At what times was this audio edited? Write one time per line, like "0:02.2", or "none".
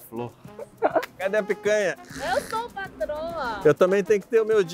0:01.1
0:02.1
0:03.6